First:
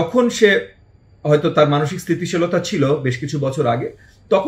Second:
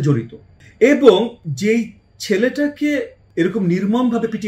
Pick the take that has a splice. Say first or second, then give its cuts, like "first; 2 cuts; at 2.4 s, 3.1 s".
second; 1 cut; at 3.2 s